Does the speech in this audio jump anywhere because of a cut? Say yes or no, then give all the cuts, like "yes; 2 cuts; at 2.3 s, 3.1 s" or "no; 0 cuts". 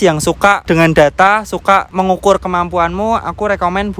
no; 0 cuts